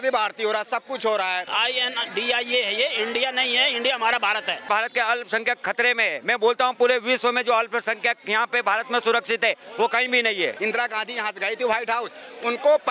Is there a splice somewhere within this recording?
yes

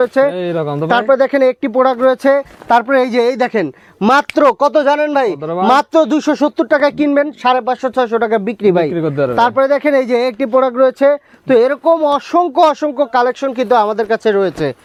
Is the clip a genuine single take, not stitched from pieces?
yes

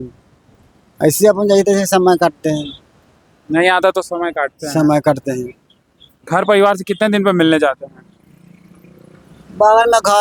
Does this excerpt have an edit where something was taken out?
no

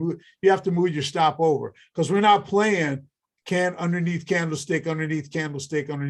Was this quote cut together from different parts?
no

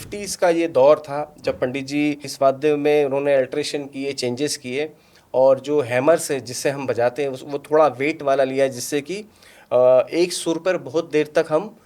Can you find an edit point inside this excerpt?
yes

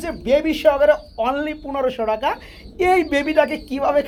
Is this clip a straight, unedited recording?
yes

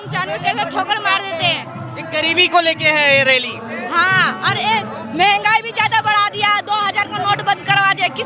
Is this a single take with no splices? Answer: yes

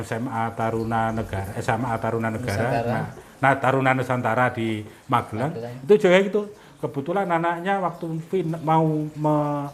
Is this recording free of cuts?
yes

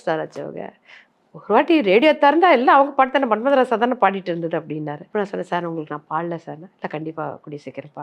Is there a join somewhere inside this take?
yes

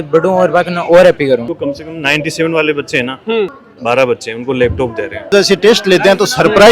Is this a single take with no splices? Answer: no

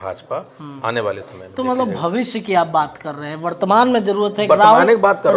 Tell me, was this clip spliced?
no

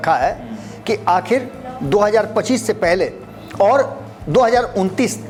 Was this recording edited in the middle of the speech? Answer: no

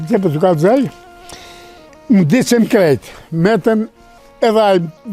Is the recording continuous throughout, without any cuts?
yes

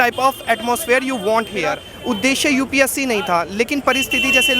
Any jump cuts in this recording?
yes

